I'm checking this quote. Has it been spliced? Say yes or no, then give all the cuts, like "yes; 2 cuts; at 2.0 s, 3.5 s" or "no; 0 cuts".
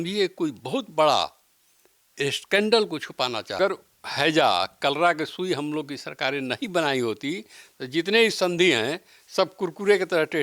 yes; 1 cut; at 3.6 s